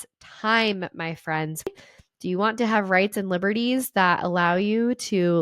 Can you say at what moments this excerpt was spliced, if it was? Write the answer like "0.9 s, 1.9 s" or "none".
1.7 s